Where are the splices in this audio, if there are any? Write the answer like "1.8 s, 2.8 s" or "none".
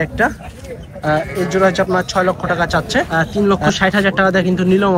3.1 s